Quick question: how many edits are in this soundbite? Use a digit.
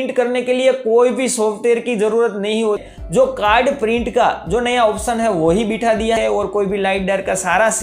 2